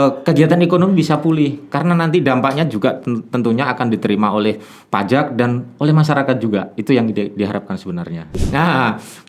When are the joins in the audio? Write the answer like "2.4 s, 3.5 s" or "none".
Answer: 8.4 s